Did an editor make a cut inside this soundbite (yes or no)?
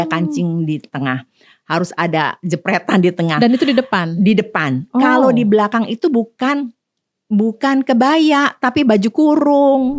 no